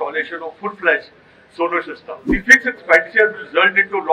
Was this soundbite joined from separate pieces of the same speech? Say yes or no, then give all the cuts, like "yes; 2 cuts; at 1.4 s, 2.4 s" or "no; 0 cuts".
yes; 1 cut; at 2.3 s